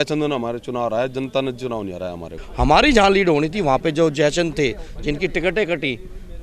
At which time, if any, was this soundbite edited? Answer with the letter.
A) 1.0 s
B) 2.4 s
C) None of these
B